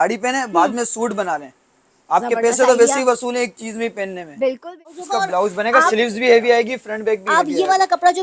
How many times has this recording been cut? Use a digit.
1